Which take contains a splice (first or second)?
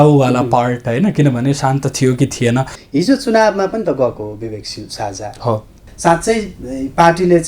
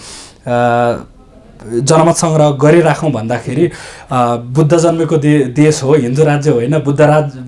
first